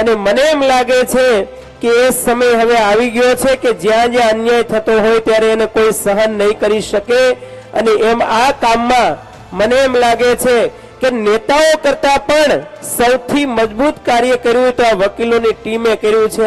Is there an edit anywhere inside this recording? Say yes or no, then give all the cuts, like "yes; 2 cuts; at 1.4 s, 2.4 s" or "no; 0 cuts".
no; 0 cuts